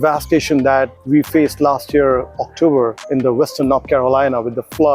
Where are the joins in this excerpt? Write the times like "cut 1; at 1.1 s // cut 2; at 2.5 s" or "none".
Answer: cut 1; at 1.0 s // cut 2; at 3.0 s